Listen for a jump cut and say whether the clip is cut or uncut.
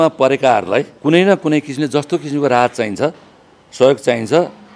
cut